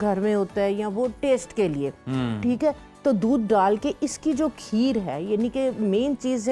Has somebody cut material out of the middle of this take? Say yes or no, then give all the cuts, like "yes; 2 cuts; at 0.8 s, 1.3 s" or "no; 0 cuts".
no; 0 cuts